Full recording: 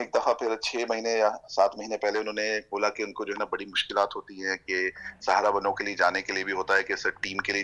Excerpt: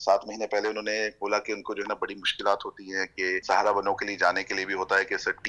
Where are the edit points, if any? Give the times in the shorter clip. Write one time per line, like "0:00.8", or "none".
0:03.4